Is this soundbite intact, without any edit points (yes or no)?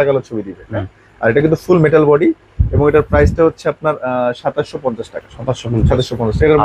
yes